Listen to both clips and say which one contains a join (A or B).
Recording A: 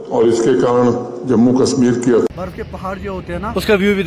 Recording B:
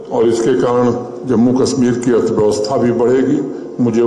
A